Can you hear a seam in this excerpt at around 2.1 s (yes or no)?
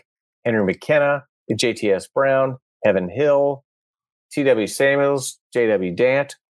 no